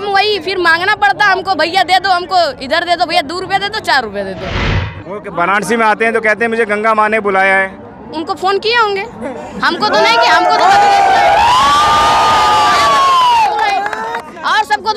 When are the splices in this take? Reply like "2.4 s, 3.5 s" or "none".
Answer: 4.8 s